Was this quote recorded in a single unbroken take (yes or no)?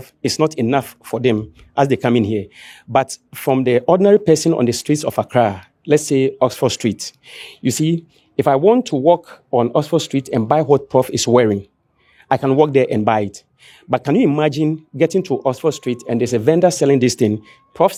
yes